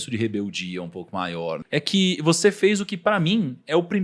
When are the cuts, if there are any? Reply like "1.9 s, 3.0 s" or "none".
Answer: 1.5 s